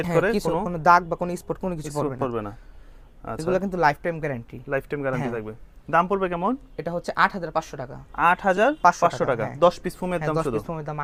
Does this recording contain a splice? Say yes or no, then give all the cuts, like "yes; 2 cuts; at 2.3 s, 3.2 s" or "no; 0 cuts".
no; 0 cuts